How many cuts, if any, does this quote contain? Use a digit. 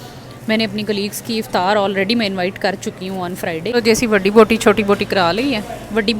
1